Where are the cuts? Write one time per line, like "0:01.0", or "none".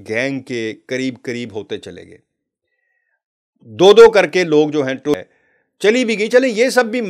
0:05.2